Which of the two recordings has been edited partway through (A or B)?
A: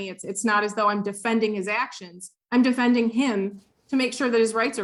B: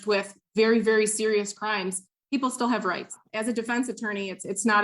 B